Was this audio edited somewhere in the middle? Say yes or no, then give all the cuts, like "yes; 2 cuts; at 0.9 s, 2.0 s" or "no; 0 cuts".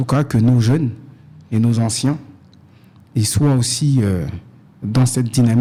no; 0 cuts